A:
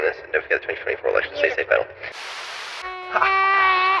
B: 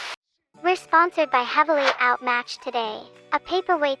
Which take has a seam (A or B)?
A